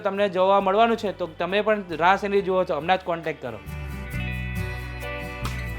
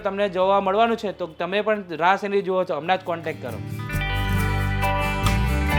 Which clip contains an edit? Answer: first; 1 cut; at 3.6 s

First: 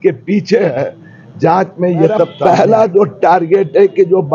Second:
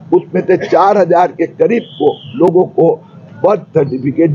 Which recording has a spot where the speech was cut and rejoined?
first; 1 cut; at 2.3 s

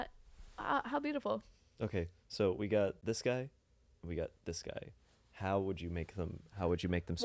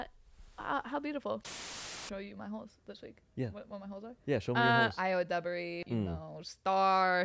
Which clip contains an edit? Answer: second; 3 cuts; at 1.7 s, 4.9 s, 5.8 s

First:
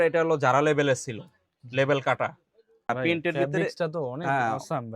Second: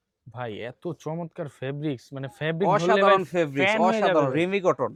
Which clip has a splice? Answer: first; 1 cut; at 2.9 s

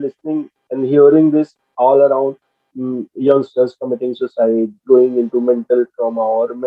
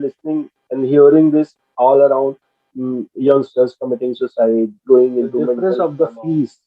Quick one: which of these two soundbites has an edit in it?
second; 1 cut; at 5.6 s

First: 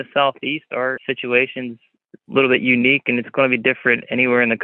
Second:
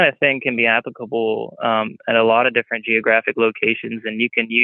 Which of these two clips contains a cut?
first; 1 cut; at 1.0 s

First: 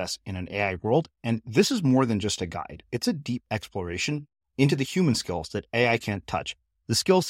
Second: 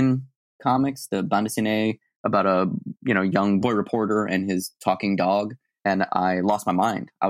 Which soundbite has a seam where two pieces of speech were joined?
second; 2 cuts; at 3.6 s, 5.7 s

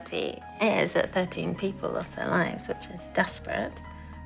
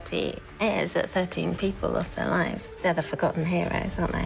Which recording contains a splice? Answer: second; 1 cut; at 2.6 s

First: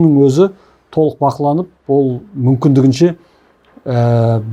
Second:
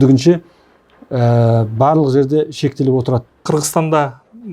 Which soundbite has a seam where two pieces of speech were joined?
second; 1 cut; at 3.4 s

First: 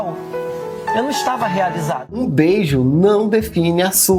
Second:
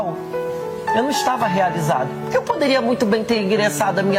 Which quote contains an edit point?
first; 1 cut; at 2.2 s

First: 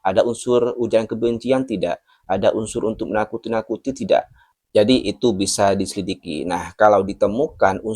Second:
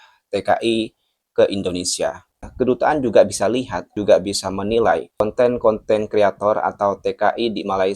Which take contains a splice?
second; 3 cuts; at 2.4 s, 3.9 s, 5.2 s

